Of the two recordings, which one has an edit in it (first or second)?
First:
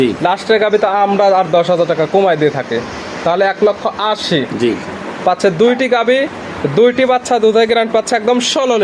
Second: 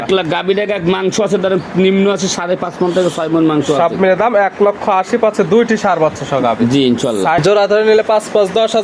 second